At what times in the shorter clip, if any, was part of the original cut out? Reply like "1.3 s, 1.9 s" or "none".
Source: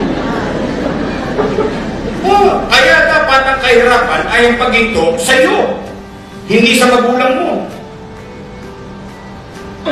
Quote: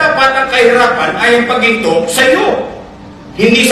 none